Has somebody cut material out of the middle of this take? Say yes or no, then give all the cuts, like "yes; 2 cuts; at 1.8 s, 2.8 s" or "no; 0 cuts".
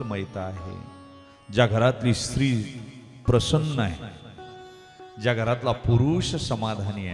no; 0 cuts